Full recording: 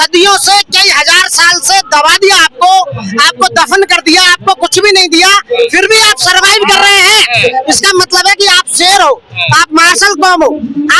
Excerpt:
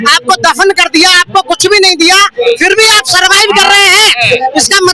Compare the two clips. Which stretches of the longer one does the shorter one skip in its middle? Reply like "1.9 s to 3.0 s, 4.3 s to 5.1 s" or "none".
none